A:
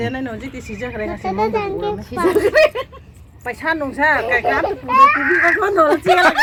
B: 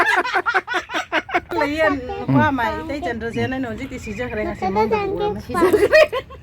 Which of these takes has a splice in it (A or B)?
B